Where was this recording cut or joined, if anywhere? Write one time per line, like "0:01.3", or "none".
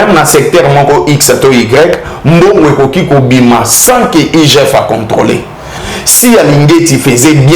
0:05.8